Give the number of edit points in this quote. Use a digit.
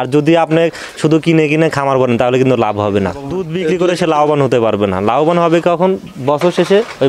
1